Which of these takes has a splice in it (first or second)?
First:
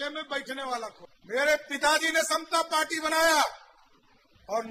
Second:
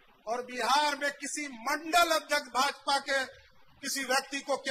first